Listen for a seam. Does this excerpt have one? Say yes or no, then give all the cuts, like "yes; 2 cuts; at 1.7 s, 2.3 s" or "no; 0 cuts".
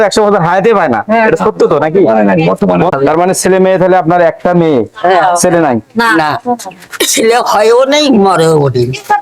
yes; 1 cut; at 2.9 s